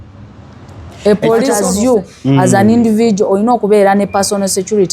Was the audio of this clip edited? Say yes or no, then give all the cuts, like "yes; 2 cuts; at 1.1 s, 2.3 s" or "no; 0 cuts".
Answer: yes; 1 cut; at 1.5 s